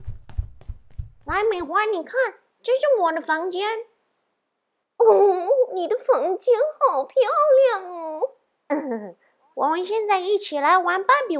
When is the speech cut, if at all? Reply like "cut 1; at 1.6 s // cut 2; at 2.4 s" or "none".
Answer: cut 1; at 1.1 s